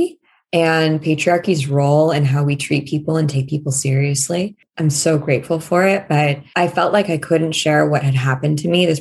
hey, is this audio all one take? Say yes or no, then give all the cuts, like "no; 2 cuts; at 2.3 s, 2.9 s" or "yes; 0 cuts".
yes; 0 cuts